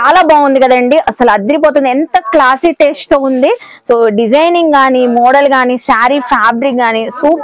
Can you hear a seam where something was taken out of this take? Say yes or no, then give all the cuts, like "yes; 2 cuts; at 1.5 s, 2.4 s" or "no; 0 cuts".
no; 0 cuts